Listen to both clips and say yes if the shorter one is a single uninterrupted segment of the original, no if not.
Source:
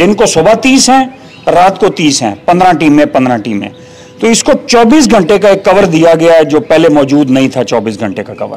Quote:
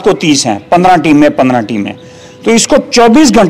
yes